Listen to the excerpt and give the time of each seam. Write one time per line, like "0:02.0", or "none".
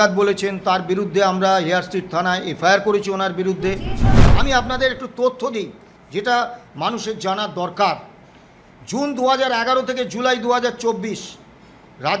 0:04.2